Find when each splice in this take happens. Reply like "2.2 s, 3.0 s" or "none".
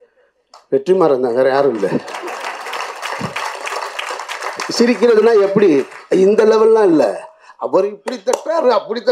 none